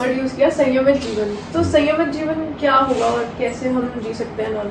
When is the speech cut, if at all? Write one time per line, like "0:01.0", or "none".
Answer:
none